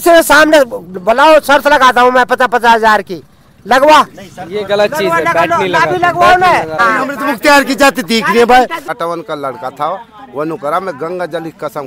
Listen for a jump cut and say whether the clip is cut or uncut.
cut